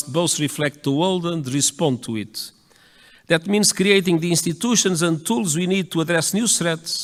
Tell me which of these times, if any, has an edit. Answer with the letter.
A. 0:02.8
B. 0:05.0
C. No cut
C